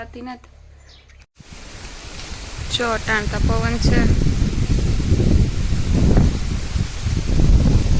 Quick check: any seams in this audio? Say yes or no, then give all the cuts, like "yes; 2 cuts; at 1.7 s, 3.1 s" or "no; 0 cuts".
yes; 1 cut; at 1.4 s